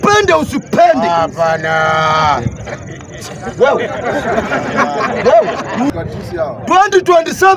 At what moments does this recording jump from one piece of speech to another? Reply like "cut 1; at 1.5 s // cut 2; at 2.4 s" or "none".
cut 1; at 5.9 s